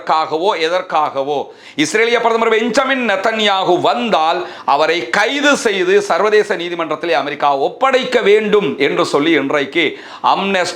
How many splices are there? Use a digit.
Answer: 0